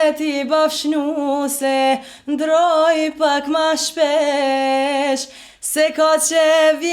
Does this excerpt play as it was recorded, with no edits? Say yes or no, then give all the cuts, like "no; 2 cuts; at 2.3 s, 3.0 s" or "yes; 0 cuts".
yes; 0 cuts